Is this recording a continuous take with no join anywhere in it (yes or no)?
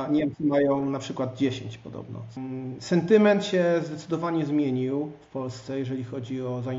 no